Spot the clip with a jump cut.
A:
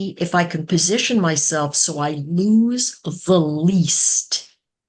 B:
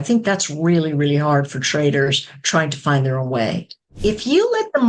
B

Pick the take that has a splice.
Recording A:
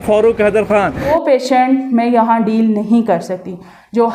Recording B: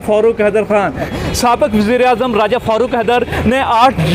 A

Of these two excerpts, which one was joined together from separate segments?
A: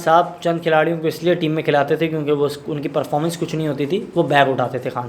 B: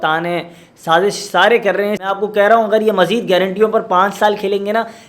B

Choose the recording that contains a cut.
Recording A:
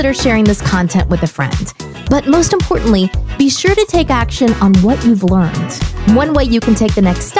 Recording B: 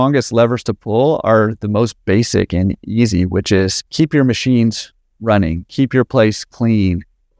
B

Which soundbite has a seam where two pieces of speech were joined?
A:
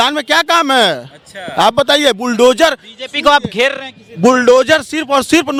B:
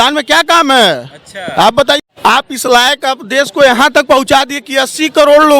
B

